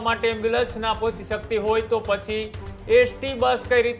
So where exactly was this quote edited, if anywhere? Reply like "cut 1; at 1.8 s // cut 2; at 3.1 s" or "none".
none